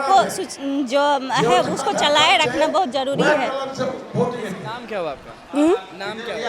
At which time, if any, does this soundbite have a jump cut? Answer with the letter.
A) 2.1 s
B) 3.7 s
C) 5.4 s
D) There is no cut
D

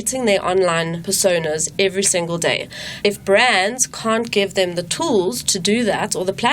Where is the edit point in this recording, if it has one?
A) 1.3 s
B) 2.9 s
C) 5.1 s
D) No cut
B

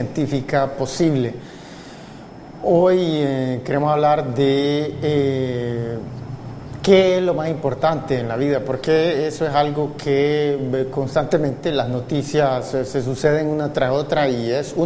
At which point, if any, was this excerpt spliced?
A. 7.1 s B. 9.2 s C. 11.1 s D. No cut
B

